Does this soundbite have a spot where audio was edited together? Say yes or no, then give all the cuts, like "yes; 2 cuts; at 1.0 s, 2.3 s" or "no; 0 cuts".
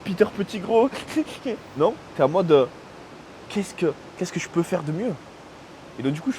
no; 0 cuts